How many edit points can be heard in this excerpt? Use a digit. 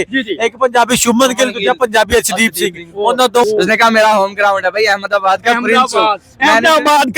1